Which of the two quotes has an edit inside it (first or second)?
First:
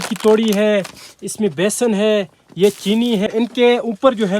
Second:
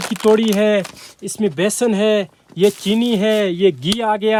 first